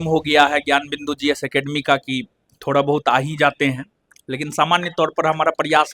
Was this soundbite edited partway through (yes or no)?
no